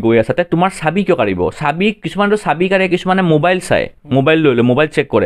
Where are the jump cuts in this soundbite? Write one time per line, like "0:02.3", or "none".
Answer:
none